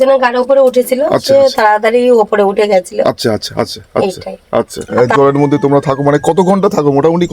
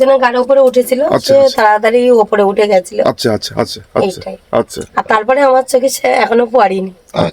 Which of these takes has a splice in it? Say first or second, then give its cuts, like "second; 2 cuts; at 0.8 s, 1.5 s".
first; 1 cut; at 4.8 s